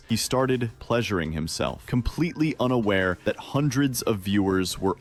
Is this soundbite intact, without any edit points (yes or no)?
yes